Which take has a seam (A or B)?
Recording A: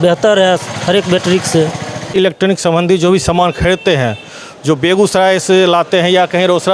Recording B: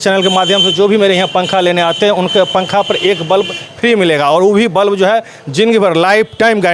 A